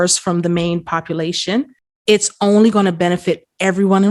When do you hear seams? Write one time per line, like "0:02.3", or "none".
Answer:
0:01.8